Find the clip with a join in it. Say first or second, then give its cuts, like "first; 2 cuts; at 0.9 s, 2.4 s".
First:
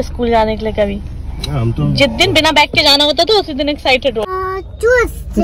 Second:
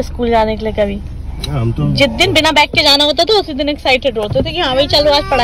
first; 1 cut; at 4.3 s